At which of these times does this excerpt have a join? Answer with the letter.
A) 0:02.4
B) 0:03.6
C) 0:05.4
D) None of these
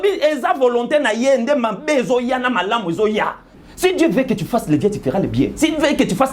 B